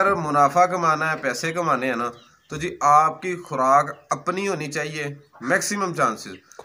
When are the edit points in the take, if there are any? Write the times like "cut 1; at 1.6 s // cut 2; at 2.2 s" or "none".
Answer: none